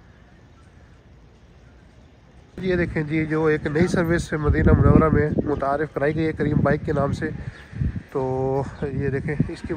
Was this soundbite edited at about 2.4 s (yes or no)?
yes